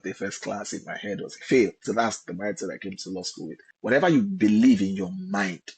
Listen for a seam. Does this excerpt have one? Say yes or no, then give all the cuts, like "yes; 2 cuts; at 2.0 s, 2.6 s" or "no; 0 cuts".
yes; 1 cut; at 3.6 s